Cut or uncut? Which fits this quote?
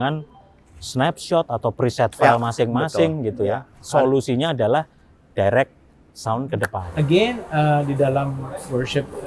cut